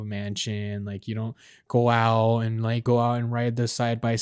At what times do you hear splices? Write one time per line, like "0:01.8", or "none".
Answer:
0:02.8